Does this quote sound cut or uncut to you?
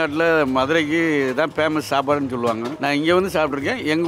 uncut